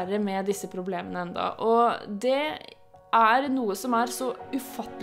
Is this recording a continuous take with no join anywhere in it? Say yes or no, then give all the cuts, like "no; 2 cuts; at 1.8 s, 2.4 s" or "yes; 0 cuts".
yes; 0 cuts